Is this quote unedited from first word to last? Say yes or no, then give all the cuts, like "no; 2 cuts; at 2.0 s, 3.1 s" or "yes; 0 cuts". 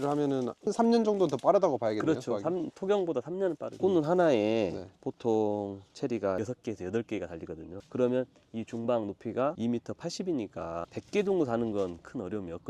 no; 2 cuts; at 3.8 s, 9.6 s